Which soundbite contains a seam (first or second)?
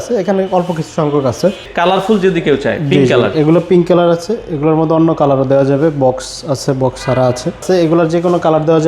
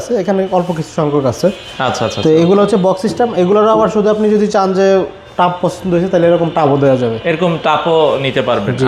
first